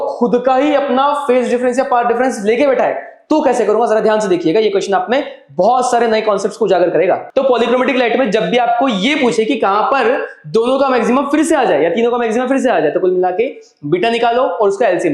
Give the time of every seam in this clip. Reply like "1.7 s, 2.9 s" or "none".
7.2 s